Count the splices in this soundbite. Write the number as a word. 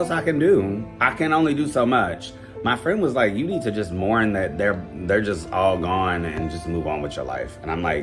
zero